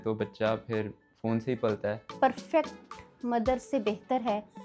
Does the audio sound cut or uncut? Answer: cut